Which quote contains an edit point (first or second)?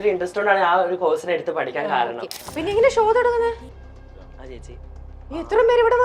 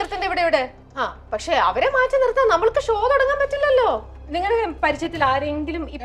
first